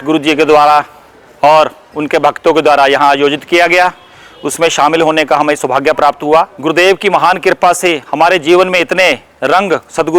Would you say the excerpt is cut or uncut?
cut